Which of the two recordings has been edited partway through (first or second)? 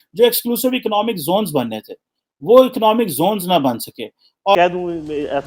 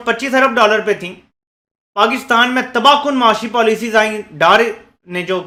first